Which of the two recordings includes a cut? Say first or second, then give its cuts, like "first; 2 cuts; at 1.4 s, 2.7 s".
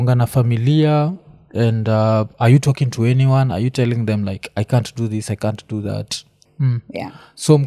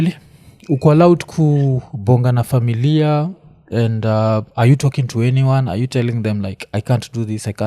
first; 1 cut; at 6.4 s